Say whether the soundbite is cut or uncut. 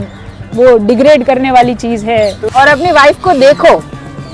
cut